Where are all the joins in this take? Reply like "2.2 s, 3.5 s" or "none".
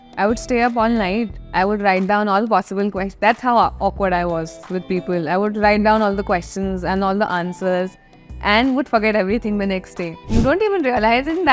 10.2 s